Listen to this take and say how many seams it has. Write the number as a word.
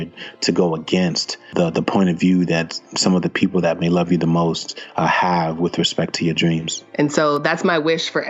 two